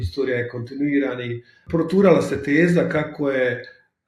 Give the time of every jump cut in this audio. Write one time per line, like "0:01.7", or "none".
0:01.6